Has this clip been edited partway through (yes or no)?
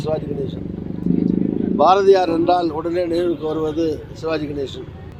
no